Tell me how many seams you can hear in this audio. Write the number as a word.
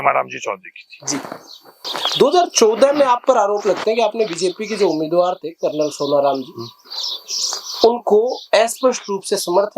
one